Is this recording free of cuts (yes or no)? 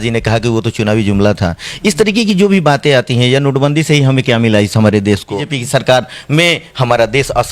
no